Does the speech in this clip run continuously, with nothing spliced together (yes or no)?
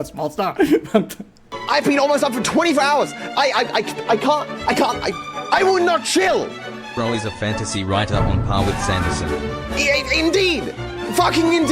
no